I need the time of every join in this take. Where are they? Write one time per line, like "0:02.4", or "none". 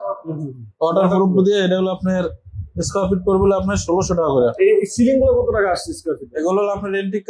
0:04.5